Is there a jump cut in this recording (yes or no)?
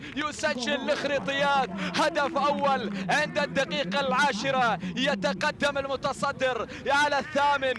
no